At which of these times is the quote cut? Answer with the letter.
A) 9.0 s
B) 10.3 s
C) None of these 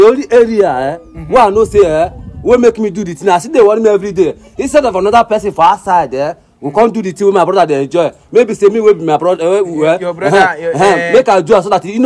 C